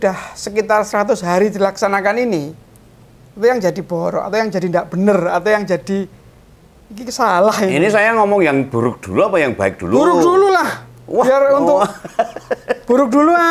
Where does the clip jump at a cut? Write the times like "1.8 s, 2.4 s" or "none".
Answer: none

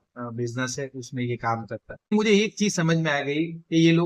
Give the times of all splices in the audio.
2.1 s

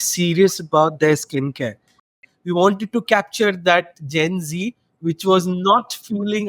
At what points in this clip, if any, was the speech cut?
2.2 s

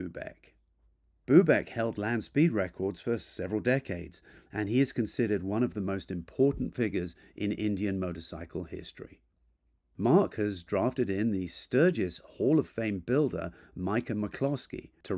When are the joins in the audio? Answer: none

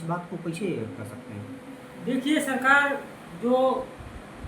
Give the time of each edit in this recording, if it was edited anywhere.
none

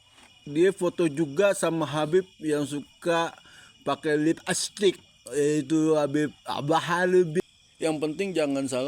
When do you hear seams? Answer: 7.4 s

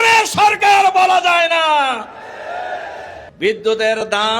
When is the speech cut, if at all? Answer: 3.2 s

